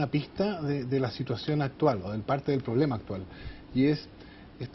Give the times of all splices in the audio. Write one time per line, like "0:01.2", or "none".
0:01.0